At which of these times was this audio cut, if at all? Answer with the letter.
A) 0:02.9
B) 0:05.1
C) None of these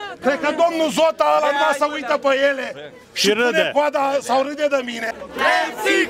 B